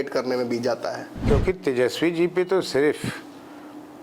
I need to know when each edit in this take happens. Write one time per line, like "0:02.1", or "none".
0:01.1